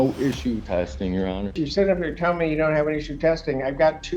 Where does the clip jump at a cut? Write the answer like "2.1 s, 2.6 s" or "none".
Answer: 1.6 s